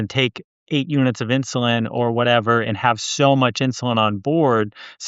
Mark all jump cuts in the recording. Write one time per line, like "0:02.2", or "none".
none